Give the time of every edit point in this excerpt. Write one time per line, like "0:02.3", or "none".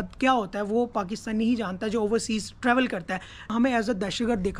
0:03.5